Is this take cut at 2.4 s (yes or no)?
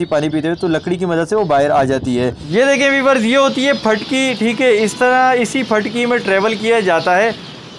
yes